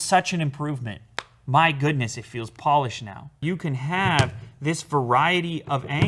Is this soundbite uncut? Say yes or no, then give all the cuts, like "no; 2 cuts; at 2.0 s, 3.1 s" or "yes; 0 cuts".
no; 1 cut; at 3.4 s